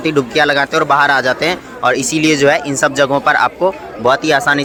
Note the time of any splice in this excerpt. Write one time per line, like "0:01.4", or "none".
none